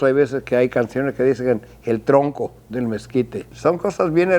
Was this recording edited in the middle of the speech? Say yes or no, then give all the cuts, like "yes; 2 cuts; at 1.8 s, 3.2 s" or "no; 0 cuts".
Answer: yes; 1 cut; at 3.4 s